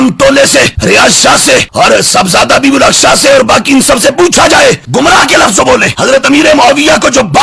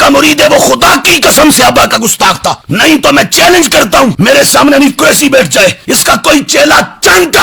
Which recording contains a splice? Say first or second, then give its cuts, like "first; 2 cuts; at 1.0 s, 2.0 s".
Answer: first; 1 cut; at 4.8 s